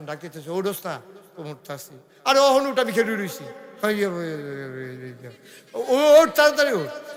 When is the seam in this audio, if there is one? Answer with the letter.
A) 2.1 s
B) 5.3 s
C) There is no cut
C